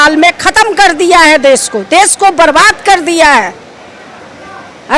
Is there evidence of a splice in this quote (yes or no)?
no